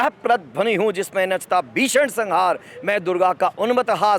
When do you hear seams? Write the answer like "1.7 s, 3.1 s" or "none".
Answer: none